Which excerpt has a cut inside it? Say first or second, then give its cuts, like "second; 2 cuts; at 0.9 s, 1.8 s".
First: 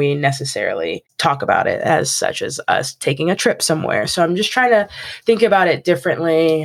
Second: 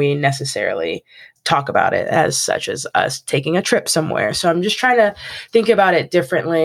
first; 1 cut; at 1.1 s